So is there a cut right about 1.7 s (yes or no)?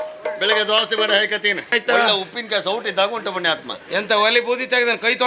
yes